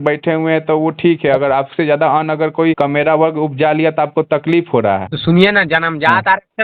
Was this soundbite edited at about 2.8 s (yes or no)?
yes